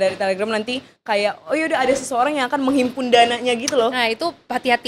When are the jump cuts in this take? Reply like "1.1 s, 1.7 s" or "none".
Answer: none